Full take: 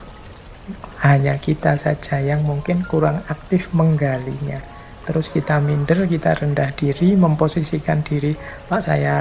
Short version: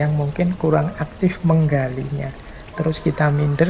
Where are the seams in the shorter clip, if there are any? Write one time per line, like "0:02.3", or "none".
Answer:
none